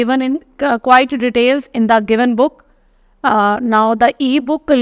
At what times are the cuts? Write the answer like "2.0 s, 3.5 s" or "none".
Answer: none